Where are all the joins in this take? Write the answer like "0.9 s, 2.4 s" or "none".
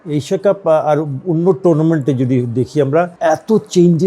3.1 s